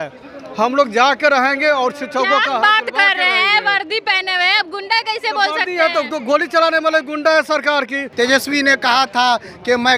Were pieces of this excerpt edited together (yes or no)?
yes